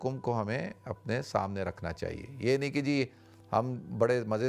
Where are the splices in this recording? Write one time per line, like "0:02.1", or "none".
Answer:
none